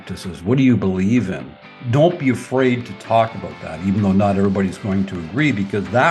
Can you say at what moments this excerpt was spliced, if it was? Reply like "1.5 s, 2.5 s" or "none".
1.8 s